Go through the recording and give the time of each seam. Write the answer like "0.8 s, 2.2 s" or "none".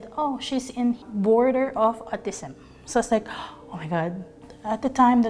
1.0 s, 4.4 s